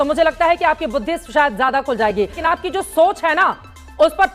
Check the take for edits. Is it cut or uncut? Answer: cut